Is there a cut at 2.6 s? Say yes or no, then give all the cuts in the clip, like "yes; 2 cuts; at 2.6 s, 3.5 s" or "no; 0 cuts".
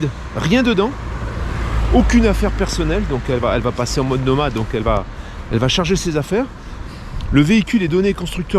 no; 0 cuts